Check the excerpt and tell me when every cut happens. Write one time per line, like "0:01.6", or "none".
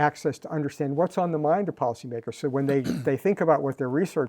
none

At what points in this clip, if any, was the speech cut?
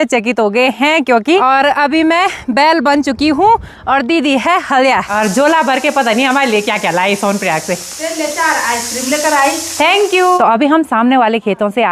0:01.4
0:05.1
0:10.4

